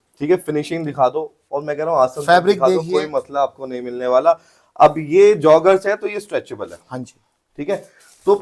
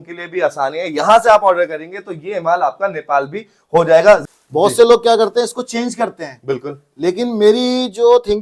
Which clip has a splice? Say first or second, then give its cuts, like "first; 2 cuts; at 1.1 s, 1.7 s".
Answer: second; 1 cut; at 4.3 s